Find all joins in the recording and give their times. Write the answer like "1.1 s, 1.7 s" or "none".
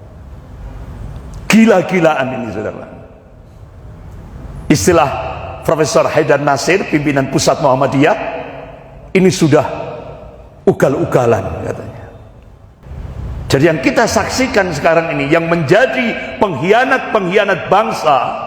12.9 s